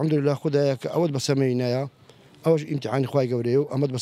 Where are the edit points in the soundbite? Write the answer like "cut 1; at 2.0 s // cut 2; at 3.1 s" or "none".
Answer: none